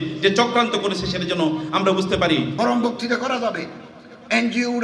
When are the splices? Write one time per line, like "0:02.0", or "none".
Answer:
0:02.5